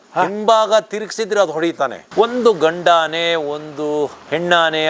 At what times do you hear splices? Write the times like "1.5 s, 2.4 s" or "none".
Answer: 2.0 s